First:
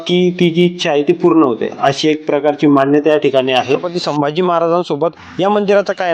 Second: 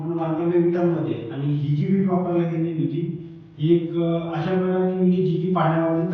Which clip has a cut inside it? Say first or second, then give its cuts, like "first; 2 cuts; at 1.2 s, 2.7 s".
first; 1 cut; at 3.9 s